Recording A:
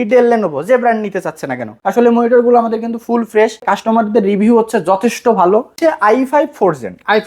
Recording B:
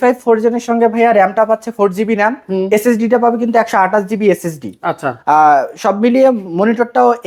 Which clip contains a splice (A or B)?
A